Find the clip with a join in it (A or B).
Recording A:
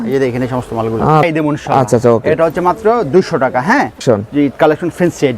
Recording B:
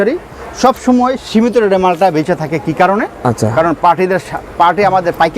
A